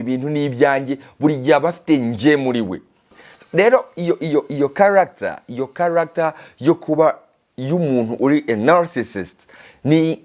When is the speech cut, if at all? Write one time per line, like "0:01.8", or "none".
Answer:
0:03.1